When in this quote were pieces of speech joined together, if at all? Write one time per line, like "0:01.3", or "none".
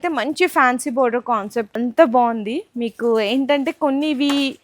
0:01.7